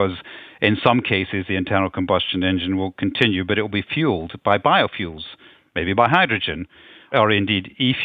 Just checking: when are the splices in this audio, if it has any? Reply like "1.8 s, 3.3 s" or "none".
7.1 s